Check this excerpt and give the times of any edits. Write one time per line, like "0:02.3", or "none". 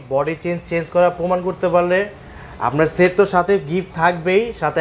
none